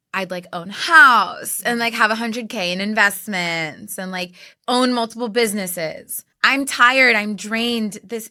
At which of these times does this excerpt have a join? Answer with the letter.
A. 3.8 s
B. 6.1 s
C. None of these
C